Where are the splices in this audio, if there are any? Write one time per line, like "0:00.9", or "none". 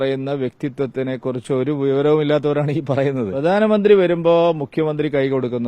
0:03.3